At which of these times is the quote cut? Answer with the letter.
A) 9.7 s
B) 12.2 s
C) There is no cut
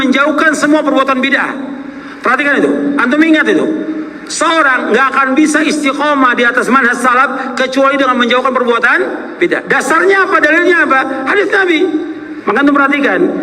B